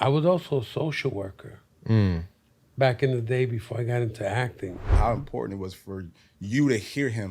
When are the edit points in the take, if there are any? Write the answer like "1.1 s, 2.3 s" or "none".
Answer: 4.9 s

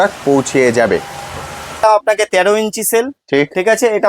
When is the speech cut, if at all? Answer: 1.8 s

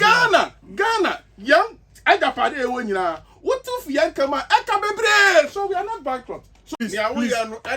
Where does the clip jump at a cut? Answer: 6.7 s

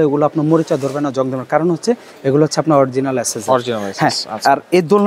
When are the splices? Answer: none

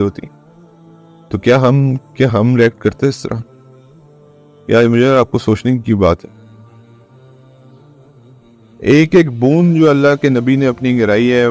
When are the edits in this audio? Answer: none

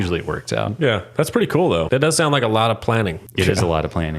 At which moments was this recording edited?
1.9 s, 3.2 s

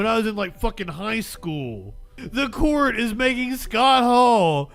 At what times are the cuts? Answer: 2.2 s

